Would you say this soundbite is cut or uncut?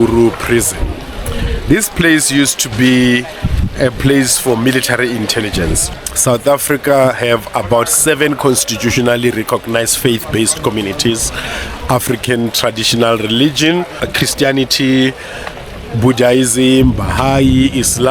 cut